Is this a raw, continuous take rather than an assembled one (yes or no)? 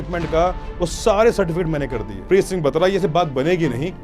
no